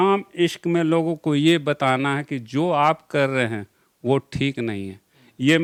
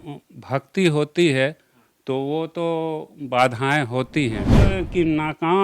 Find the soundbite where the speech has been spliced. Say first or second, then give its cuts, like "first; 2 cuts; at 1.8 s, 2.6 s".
second; 1 cut; at 4.5 s